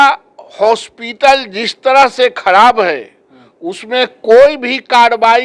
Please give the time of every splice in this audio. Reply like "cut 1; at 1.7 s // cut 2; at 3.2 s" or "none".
none